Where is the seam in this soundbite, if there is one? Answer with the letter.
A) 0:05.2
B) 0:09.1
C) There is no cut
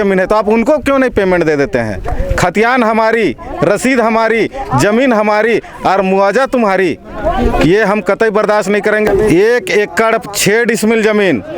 B